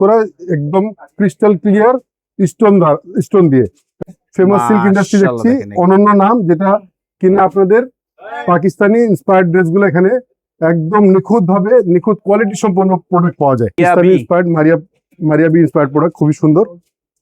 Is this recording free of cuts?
no; 2 cuts; at 4.0 s, 13.8 s

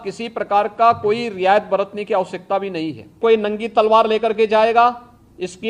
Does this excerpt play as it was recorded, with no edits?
no; 1 cut; at 3.2 s

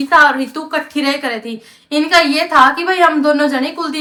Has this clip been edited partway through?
no; 0 cuts

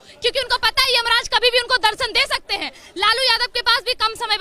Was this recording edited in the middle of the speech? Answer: no; 0 cuts

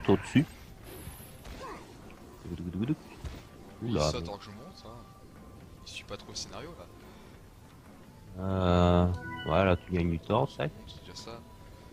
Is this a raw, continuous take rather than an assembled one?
no; 1 cut; at 8.4 s

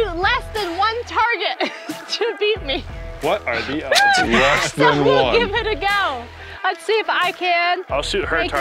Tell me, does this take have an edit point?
no; 0 cuts

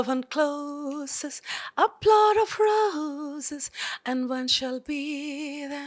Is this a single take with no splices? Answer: yes; 0 cuts

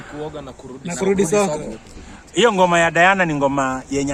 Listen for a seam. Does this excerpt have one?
no; 0 cuts

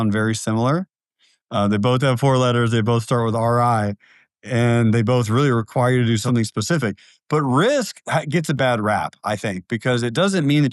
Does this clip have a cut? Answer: yes; 2 cuts; at 6.2 s, 8.6 s

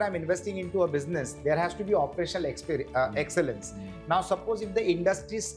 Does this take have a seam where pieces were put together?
no; 0 cuts

